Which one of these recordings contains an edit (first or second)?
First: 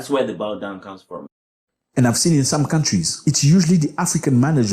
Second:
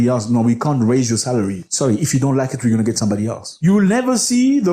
first